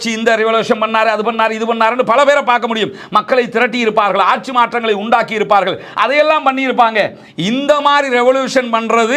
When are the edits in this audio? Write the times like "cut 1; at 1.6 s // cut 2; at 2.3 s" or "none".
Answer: none